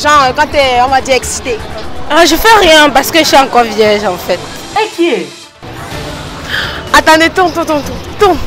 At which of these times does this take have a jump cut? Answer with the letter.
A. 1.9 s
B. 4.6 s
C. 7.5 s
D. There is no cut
A